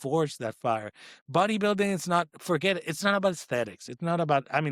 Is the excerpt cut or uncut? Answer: uncut